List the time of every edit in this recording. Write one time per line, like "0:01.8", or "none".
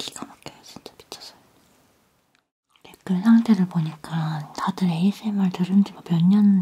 0:03.0

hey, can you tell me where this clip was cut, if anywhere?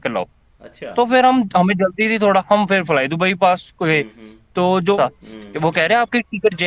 0:05.0

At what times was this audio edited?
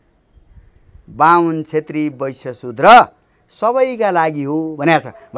none

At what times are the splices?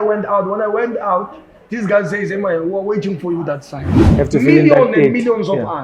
0:04.0

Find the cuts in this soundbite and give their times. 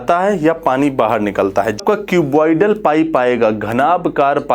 0:01.8

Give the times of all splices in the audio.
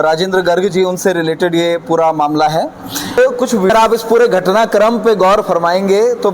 0:03.7

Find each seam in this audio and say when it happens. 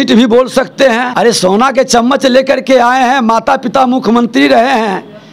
0:01.1

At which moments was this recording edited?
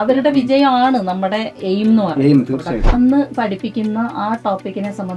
0:02.8

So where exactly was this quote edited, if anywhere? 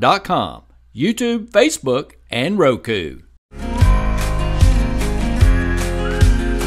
0:03.6

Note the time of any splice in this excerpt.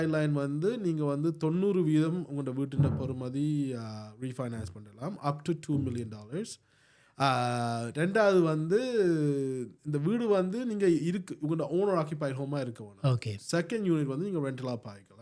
none

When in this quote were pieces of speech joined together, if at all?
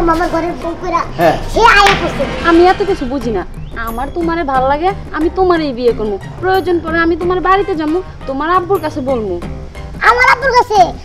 0:02.2

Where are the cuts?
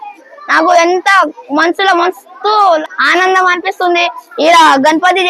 0:02.8

